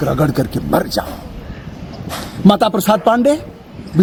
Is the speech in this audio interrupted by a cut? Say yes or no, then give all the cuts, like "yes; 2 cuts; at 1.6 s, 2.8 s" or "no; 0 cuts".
no; 0 cuts